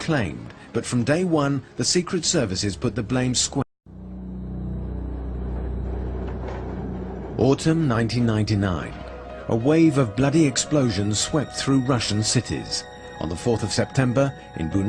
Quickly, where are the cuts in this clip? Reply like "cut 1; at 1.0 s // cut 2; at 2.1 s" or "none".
none